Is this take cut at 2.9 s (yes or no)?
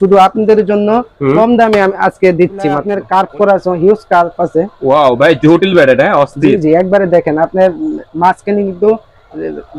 yes